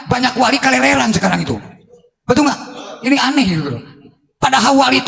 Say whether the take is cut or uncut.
uncut